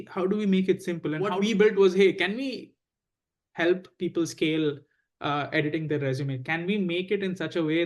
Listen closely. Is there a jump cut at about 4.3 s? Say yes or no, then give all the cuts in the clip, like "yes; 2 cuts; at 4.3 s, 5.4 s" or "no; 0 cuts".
no; 1 cut; at 1.3 s